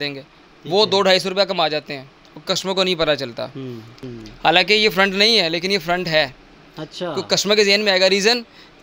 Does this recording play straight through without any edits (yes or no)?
no